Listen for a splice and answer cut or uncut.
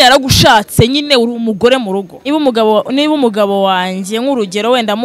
cut